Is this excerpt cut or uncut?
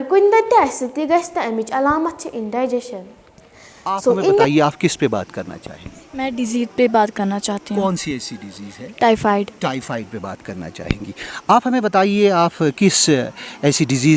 cut